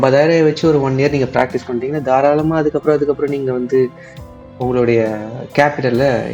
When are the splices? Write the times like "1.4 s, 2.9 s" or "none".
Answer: none